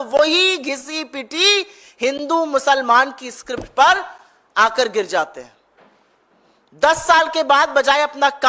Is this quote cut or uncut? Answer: uncut